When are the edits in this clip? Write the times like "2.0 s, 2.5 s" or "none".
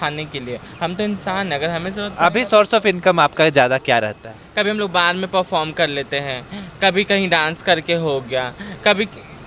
none